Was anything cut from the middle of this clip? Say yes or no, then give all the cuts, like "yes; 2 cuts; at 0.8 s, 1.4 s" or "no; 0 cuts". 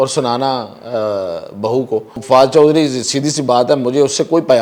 yes; 1 cut; at 2.2 s